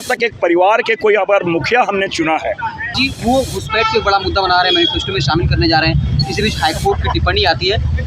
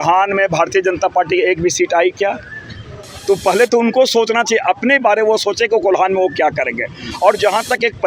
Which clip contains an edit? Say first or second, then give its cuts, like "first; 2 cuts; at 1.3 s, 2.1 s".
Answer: first; 1 cut; at 2.9 s